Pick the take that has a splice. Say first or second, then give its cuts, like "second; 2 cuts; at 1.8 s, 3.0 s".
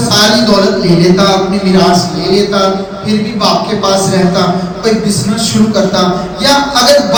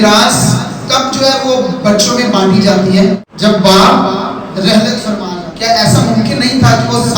second; 2 cuts; at 3.3 s, 5.3 s